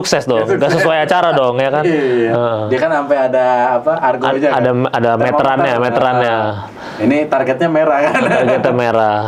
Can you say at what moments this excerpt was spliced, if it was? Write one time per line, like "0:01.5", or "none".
none